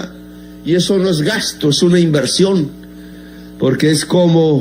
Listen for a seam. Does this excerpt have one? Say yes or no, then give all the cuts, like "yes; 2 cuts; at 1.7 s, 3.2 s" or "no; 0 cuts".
no; 0 cuts